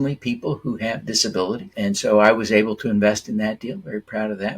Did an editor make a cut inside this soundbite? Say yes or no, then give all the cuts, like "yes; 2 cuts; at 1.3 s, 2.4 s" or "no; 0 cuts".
yes; 1 cut; at 1.7 s